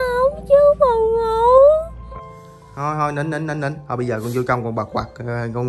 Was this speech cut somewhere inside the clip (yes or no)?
yes